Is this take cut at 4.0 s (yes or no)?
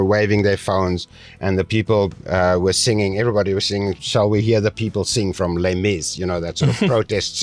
yes